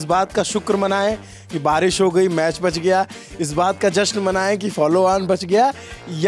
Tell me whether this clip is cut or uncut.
uncut